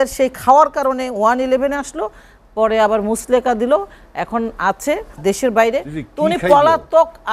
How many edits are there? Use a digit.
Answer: 1